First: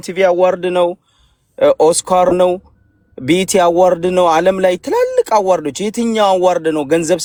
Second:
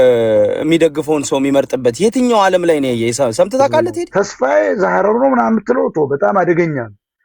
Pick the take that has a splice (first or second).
second